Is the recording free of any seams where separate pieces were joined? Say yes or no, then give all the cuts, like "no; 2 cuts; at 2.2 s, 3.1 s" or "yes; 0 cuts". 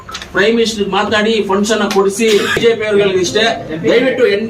no; 1 cut; at 2.5 s